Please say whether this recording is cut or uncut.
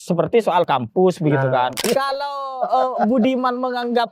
cut